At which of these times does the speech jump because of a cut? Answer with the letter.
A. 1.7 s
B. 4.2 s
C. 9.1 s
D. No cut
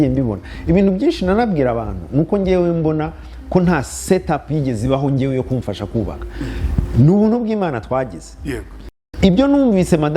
C